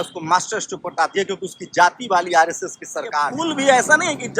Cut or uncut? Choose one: cut